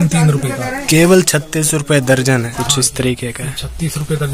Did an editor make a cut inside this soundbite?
yes; 1 cut; at 2.6 s

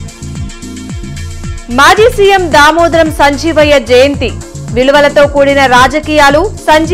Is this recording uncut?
yes; 0 cuts

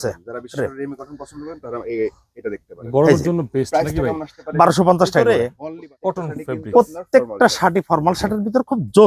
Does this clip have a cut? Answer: yes; 1 cut; at 5.4 s

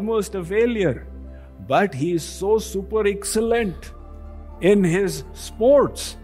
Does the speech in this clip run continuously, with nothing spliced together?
yes; 0 cuts

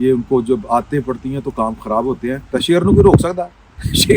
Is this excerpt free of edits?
no; 1 cut; at 2.4 s

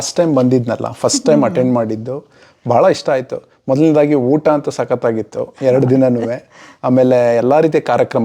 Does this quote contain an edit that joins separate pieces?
no; 0 cuts

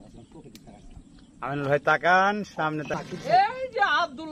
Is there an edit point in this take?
yes; 1 cut; at 2.9 s

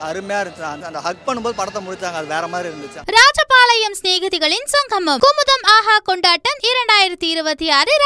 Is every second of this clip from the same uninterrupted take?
no; 2 cuts; at 0.8 s, 2.9 s

